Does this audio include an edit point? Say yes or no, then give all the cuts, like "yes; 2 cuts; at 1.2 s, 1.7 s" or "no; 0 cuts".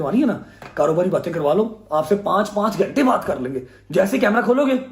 no; 0 cuts